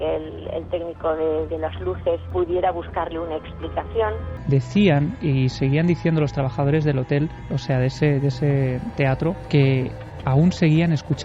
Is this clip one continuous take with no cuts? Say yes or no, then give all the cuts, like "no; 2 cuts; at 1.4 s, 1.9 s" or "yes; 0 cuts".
no; 1 cut; at 4.4 s